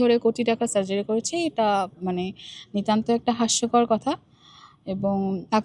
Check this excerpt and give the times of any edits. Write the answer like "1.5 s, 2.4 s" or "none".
none